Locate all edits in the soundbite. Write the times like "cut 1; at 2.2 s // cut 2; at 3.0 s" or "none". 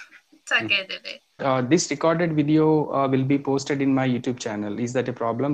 cut 1; at 1.4 s